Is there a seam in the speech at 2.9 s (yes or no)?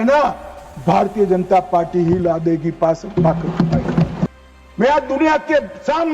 no